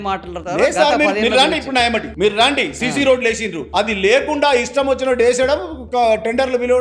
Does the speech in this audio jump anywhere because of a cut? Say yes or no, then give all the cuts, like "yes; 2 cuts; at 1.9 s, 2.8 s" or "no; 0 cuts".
yes; 1 cut; at 3.7 s